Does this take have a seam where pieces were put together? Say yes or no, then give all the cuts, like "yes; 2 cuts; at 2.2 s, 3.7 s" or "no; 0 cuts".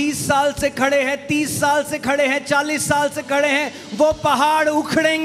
no; 0 cuts